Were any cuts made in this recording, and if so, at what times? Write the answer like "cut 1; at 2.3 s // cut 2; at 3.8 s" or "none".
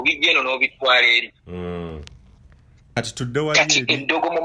cut 1; at 3.0 s